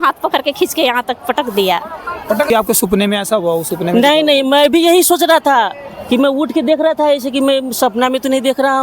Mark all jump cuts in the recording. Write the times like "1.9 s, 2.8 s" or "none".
2.5 s